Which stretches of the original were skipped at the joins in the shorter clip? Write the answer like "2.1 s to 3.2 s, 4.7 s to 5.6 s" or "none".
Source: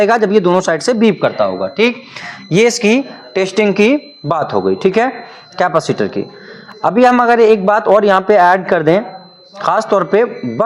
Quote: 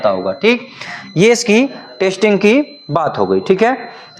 none